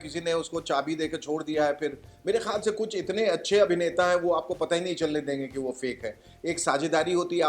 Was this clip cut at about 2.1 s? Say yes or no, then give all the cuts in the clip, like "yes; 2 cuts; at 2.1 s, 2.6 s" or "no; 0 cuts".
yes; 1 cut; at 2.1 s